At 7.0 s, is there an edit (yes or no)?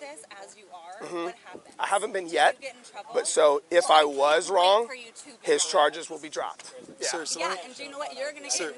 no